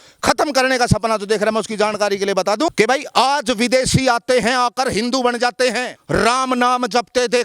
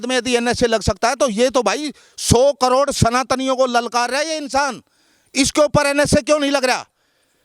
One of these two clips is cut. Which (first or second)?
first